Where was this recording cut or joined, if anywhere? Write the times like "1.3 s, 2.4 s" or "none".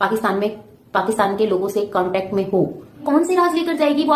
3.0 s